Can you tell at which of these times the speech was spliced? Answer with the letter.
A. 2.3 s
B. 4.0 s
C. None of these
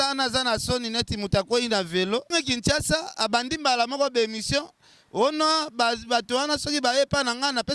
A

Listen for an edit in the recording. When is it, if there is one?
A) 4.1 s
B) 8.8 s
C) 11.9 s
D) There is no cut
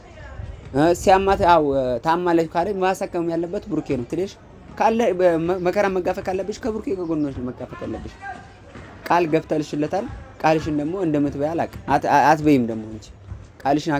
A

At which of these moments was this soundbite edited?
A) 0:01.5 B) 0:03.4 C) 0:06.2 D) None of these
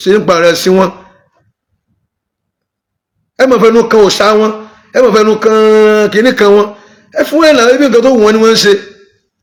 D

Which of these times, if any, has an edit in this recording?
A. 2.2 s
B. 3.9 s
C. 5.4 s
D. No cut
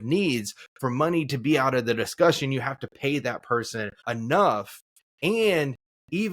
B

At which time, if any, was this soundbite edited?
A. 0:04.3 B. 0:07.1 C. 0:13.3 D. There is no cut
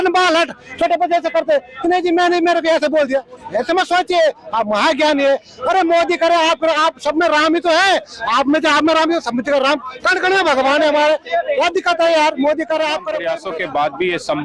C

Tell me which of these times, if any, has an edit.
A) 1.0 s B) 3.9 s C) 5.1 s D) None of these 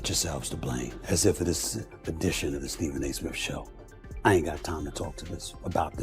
A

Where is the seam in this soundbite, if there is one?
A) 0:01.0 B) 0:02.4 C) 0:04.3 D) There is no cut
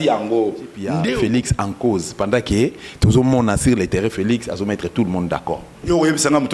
A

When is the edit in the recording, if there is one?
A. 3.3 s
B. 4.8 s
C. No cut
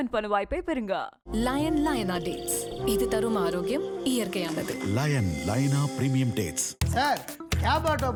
C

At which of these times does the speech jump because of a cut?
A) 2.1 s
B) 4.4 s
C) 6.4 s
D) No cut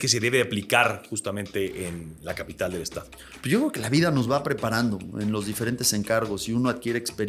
D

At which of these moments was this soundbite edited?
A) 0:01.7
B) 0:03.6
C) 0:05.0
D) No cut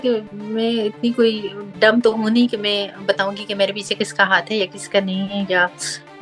D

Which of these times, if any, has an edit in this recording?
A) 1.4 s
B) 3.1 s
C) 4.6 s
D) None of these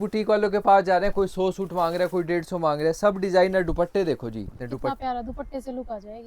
C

